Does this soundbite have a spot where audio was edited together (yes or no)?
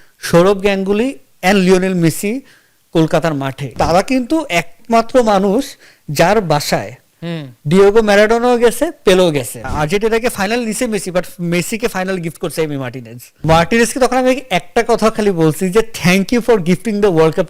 yes